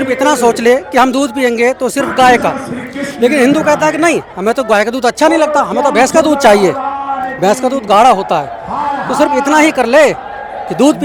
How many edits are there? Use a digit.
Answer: 0